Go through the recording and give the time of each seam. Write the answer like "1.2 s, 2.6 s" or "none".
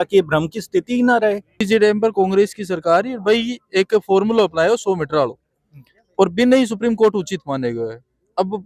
1.5 s